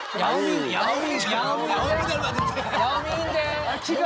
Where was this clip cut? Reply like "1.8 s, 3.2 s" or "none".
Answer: none